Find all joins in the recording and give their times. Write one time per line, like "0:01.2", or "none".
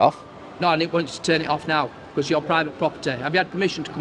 none